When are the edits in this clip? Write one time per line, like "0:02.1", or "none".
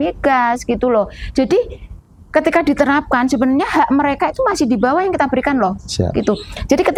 none

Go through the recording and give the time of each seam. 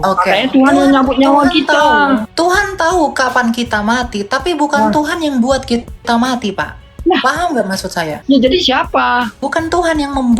0:02.3
0:08.2
0:09.4

